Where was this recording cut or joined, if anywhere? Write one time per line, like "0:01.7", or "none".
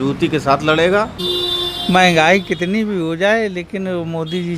0:01.2